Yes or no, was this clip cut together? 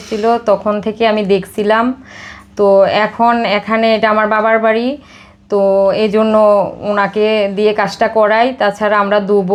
no